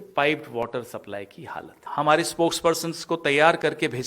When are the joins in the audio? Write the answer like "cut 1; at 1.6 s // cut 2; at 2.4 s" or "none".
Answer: cut 1; at 1.8 s

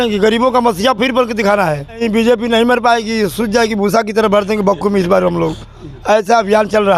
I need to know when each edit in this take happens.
cut 1; at 2.0 s

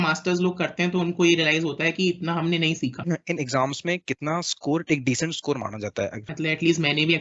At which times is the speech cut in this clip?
cut 1; at 3.0 s // cut 2; at 6.3 s

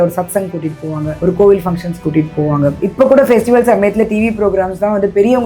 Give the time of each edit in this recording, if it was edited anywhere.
cut 1; at 1.1 s // cut 2; at 2.8 s

